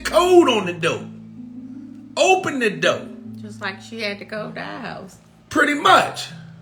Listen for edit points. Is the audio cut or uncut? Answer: uncut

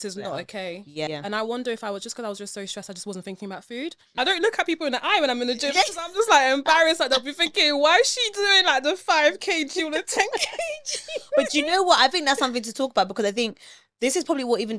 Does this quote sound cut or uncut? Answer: cut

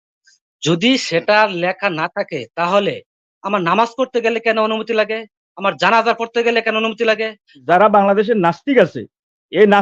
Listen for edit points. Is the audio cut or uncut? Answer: cut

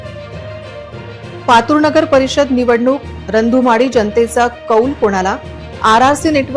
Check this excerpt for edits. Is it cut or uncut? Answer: uncut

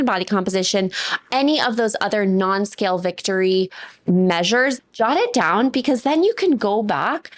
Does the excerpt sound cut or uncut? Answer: cut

